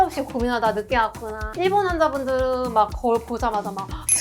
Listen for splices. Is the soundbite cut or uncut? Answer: cut